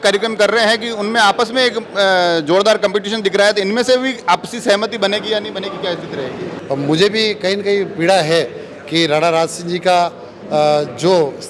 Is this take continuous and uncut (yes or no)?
no